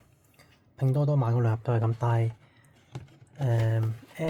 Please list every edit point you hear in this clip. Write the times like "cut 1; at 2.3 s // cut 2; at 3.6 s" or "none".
none